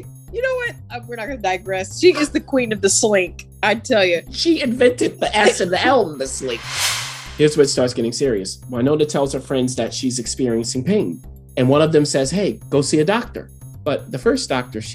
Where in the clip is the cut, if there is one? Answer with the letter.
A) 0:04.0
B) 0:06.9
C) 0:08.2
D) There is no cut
B